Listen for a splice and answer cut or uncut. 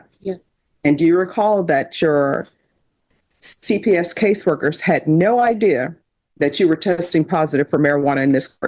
uncut